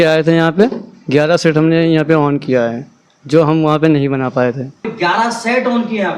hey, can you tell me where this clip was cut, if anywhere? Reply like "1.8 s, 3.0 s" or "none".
4.9 s

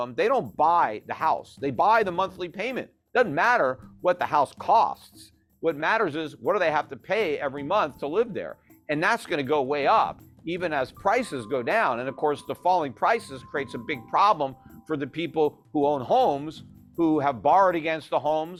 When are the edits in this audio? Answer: none

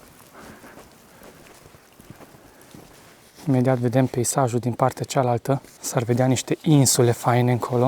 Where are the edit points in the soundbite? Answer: 3.3 s, 5.8 s

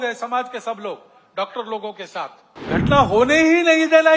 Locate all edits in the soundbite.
2.5 s

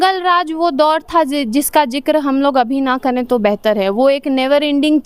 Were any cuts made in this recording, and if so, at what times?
none

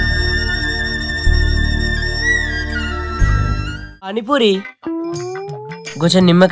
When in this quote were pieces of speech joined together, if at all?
4.2 s

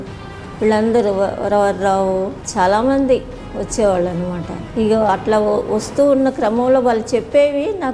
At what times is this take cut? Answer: 2.4 s, 4.6 s

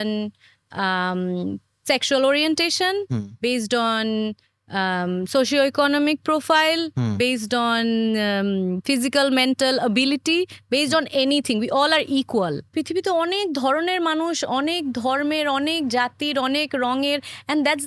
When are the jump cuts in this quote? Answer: 12.7 s

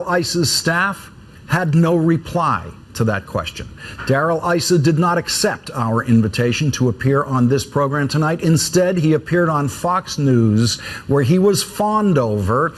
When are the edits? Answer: 5.0 s

